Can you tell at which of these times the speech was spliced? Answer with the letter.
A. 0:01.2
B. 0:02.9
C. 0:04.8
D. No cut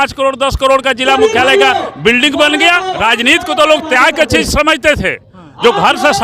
B